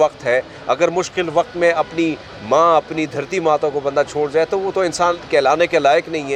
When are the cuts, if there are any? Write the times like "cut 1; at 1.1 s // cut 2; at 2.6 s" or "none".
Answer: none